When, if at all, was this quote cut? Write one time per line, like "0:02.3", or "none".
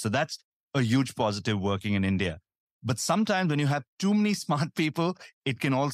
none